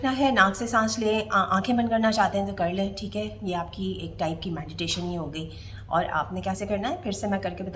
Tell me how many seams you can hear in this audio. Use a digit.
0